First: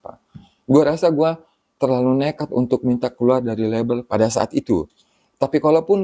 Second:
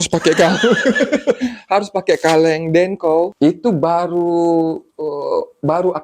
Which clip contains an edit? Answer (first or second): second